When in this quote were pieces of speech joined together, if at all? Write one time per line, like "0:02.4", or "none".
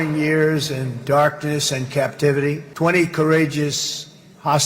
0:02.7